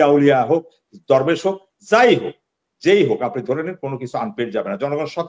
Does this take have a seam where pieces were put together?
no; 0 cuts

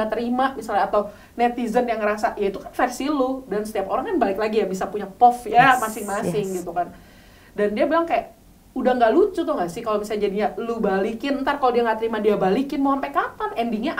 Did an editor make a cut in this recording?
no; 0 cuts

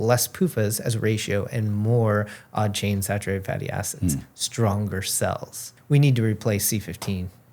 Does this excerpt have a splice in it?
yes; 1 cut; at 5.7 s

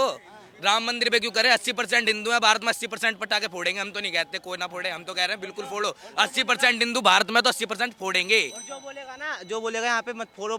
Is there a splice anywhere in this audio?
no; 0 cuts

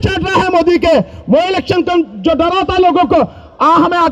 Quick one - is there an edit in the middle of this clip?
no; 0 cuts

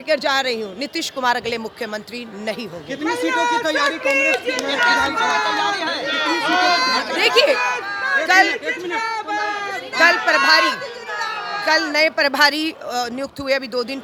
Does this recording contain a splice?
no; 0 cuts

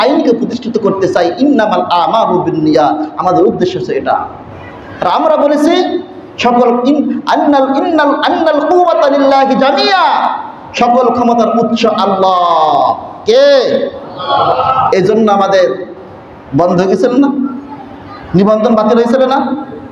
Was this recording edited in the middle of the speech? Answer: no; 0 cuts

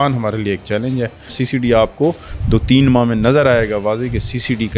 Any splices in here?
yes; 1 cut; at 1.3 s

